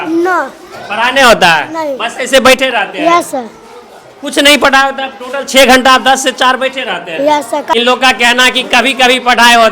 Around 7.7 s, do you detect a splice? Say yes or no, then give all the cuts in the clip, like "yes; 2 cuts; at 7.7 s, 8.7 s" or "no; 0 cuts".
yes; 1 cut; at 7.7 s